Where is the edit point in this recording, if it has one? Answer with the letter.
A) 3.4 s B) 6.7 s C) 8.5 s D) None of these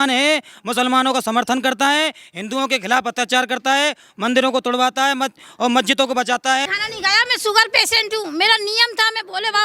B